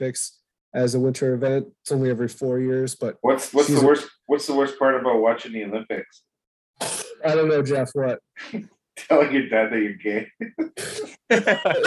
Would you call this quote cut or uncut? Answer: uncut